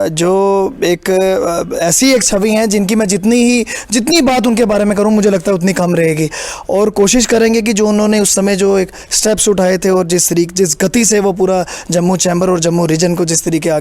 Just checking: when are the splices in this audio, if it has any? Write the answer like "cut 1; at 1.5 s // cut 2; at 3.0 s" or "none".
none